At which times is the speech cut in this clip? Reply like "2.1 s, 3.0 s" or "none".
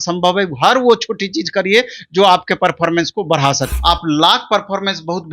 3.7 s